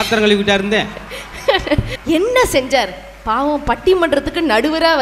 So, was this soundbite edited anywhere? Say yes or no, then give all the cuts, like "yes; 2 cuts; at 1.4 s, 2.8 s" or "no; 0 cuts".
yes; 1 cut; at 1.9 s